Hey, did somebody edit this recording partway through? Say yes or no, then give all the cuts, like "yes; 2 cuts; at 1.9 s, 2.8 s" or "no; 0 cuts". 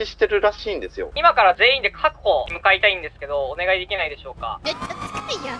yes; 3 cuts; at 1.0 s, 2.5 s, 4.6 s